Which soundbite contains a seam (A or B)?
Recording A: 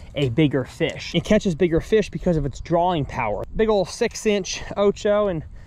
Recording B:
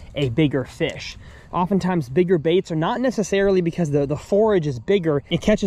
A